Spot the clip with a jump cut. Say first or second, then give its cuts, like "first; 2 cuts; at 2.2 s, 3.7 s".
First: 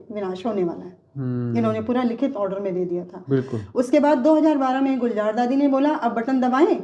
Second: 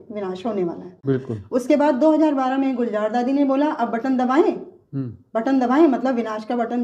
second; 1 cut; at 0.9 s